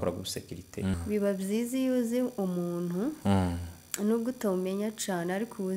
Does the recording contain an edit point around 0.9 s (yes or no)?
yes